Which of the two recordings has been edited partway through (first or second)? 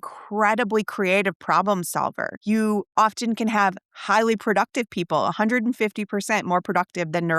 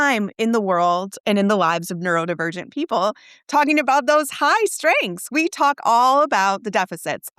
first